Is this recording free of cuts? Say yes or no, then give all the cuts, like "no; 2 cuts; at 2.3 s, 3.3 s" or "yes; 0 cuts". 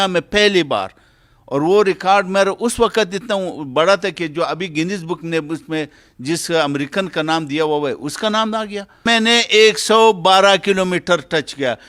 no; 1 cut; at 9.1 s